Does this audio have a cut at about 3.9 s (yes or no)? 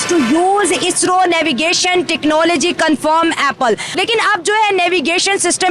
yes